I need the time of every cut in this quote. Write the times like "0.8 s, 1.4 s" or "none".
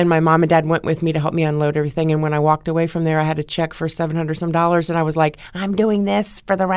none